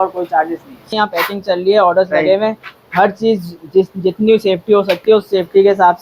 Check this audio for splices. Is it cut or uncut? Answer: uncut